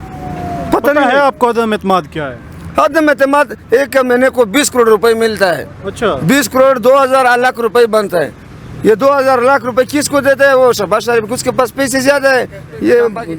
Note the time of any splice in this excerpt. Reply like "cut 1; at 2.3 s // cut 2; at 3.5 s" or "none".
none